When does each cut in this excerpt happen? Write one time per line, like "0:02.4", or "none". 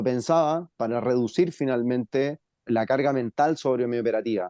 0:02.6